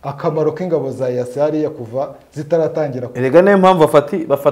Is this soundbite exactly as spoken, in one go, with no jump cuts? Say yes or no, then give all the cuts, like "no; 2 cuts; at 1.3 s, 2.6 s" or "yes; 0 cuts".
yes; 0 cuts